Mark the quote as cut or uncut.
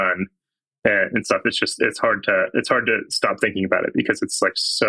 uncut